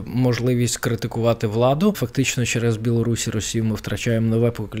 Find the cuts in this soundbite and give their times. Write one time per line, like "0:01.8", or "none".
0:02.0

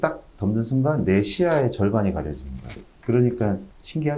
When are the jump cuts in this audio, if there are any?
none

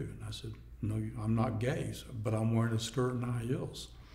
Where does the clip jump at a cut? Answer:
none

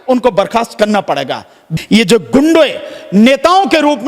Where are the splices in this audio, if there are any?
0:01.6

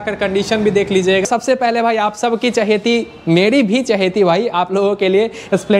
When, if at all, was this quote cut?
0:01.3

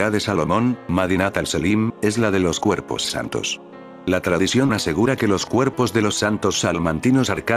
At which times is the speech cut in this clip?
0:02.5
0:03.9

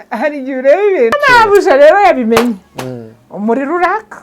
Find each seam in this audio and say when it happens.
0:01.2

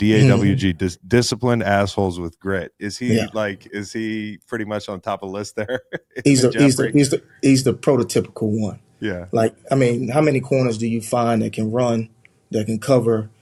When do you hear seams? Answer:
none

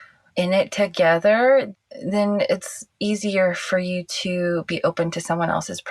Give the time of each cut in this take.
0:01.7

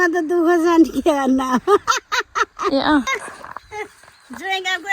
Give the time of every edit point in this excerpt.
0:03.2

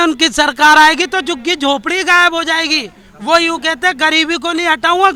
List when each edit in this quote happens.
none

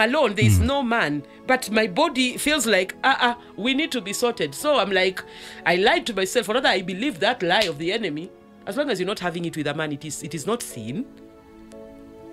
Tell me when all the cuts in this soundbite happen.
none

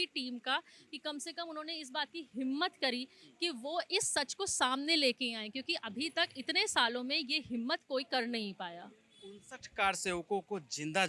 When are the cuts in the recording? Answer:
none

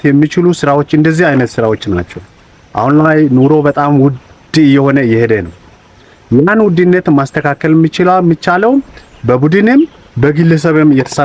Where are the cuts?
none

